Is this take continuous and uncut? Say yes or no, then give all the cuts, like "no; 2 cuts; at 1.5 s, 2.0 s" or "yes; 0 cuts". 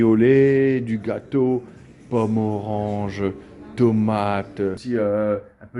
no; 1 cut; at 4.8 s